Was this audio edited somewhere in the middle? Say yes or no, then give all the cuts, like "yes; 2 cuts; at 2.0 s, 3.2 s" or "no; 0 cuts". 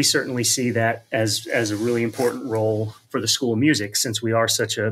no; 0 cuts